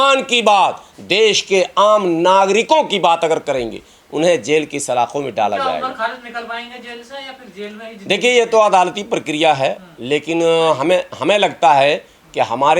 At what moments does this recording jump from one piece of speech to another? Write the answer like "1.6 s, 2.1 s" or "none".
none